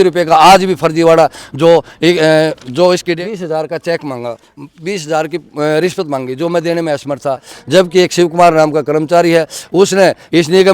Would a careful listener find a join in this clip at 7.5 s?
yes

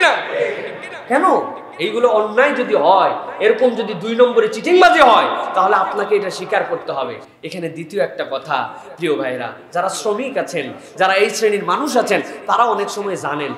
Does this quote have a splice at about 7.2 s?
no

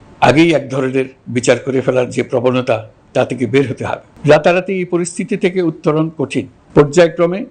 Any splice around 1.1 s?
no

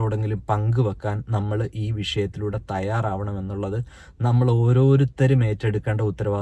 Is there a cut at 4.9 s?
no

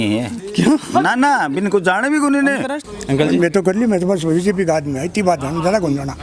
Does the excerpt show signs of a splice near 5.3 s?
no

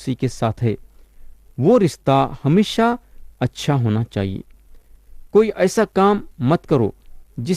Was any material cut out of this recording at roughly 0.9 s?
no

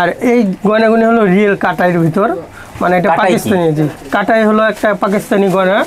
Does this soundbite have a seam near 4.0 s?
no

